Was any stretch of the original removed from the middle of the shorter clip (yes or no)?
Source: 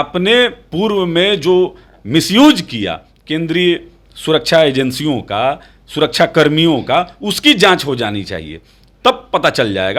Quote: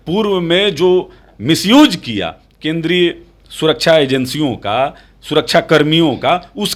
no